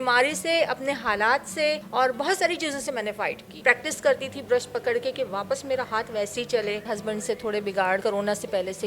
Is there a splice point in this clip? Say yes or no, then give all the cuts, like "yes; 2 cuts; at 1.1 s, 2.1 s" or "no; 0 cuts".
yes; 4 cuts; at 1.8 s, 3.6 s, 6.8 s, 8.0 s